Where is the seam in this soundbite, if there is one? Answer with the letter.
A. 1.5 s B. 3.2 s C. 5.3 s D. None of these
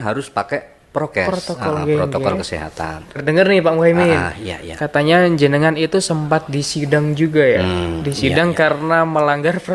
B